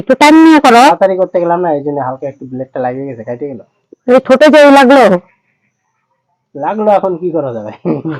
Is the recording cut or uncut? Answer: cut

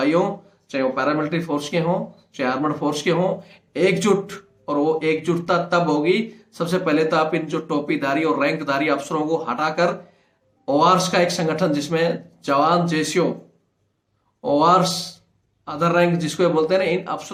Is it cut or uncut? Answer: uncut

